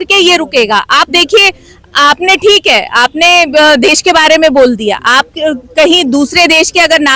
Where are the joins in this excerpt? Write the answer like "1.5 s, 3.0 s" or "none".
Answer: none